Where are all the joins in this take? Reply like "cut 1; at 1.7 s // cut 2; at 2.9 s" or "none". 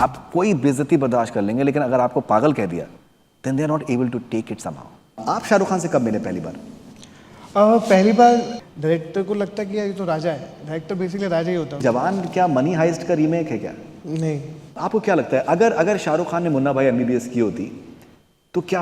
cut 1; at 5.2 s // cut 2; at 8.6 s // cut 3; at 11.8 s // cut 4; at 14.7 s